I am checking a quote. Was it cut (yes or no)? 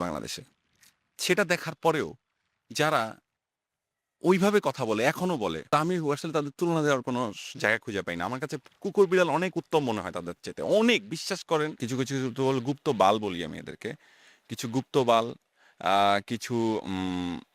yes